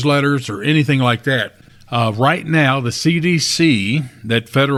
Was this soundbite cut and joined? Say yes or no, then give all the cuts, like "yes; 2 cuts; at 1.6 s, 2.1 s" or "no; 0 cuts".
no; 0 cuts